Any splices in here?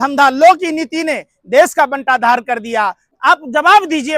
yes; 1 cut; at 3.0 s

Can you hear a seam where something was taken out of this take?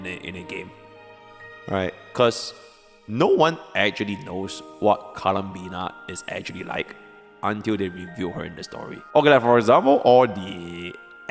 yes; 1 cut; at 9.0 s

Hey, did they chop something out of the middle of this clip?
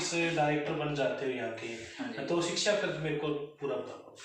no; 0 cuts

